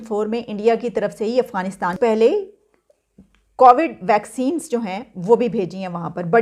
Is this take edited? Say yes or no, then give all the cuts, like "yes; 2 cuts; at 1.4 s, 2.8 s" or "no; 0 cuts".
yes; 1 cut; at 1.9 s